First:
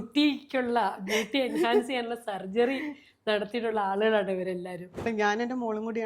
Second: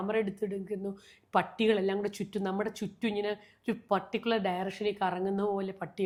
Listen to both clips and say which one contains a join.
first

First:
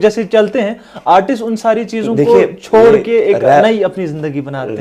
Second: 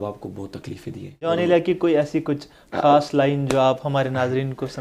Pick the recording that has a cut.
second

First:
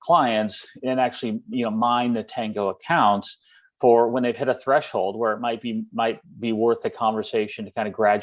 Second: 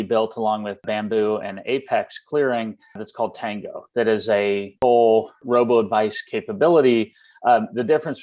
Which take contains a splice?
second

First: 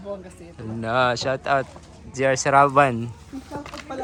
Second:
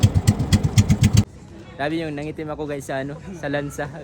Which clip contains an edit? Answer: second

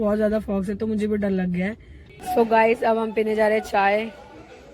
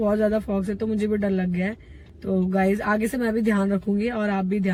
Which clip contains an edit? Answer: first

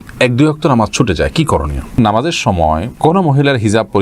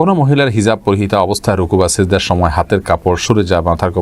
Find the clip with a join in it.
first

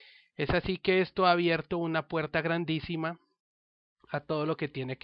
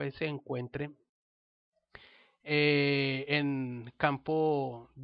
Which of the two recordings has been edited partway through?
second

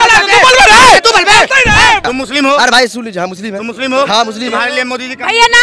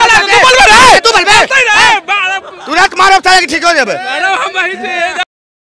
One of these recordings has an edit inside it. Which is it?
first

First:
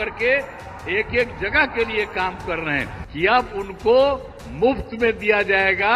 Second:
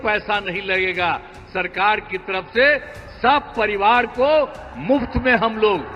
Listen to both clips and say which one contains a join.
first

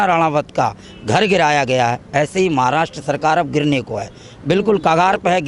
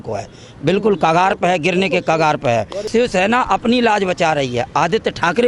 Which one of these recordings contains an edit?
second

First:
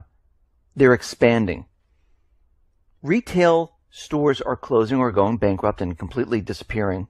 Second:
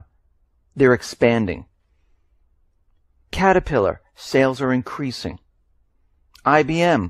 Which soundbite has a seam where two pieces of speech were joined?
second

